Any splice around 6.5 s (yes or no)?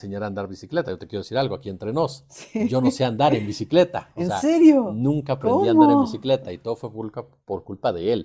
no